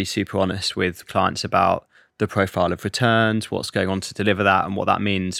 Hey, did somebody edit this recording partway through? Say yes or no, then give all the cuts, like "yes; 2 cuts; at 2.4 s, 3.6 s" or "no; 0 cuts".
yes; 2 cuts; at 1.0 s, 3.7 s